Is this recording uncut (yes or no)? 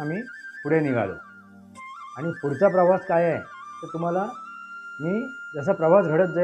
yes